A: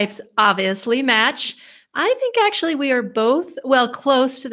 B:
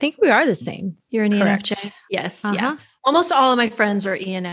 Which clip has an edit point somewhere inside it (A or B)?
B